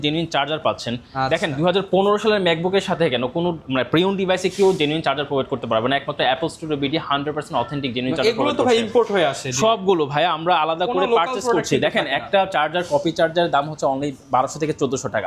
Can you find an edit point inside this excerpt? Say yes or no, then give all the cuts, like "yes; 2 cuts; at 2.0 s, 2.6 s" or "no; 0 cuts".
no; 0 cuts